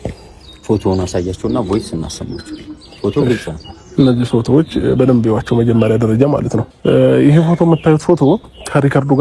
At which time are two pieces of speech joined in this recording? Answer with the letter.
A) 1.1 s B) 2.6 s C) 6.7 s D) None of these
C